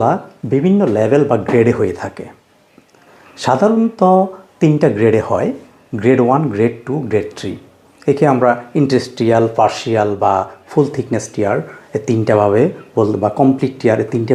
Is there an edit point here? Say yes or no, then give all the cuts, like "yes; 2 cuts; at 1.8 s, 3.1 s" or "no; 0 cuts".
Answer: no; 0 cuts